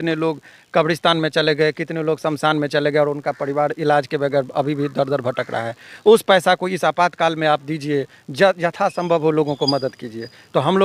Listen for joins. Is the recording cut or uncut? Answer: uncut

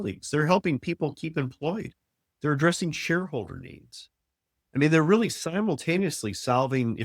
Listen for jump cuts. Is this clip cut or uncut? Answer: uncut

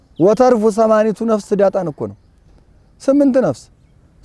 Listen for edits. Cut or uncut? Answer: uncut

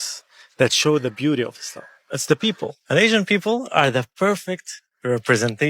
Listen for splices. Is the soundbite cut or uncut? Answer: uncut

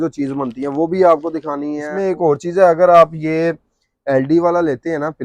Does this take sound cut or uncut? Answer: cut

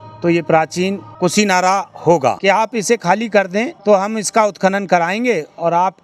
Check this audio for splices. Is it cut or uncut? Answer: cut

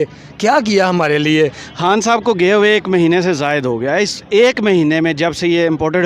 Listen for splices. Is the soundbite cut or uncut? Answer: uncut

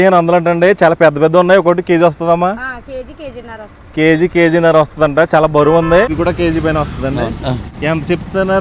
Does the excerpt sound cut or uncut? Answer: cut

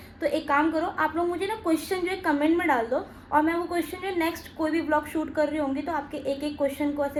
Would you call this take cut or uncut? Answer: uncut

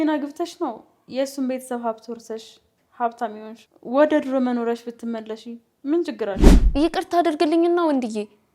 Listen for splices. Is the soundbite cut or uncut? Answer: cut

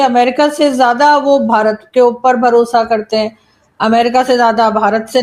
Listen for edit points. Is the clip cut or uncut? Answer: uncut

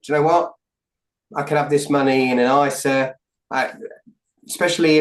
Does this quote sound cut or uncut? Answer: uncut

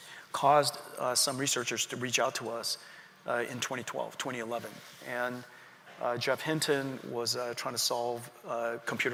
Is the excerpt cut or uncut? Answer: uncut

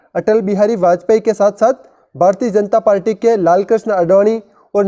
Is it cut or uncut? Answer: uncut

